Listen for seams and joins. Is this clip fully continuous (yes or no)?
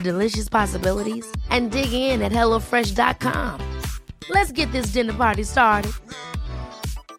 yes